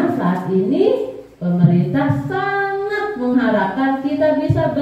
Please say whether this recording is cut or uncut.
uncut